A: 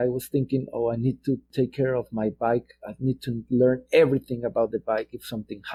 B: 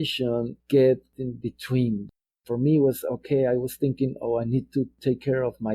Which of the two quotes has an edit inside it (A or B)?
B